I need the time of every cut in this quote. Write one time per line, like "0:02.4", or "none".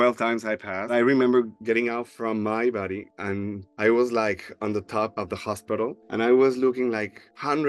0:00.9